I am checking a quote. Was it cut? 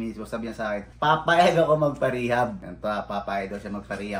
yes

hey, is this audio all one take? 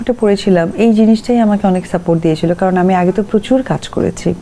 yes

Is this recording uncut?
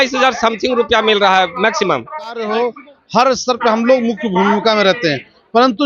no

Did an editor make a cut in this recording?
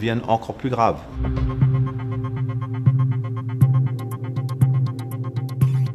yes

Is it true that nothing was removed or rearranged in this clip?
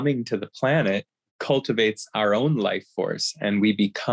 no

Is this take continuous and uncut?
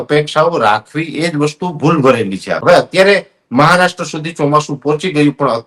no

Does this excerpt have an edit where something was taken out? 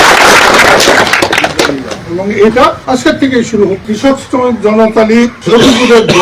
yes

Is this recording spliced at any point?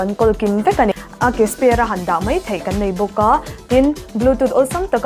yes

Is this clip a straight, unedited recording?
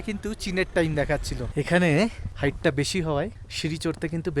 no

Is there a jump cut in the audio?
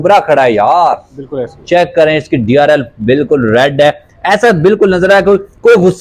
no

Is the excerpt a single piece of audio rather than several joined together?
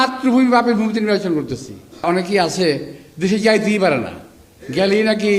no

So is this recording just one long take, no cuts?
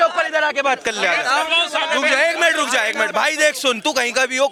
yes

